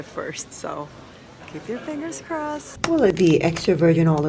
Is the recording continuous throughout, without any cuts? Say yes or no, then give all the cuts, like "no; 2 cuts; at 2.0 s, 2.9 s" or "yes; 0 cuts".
no; 1 cut; at 3.1 s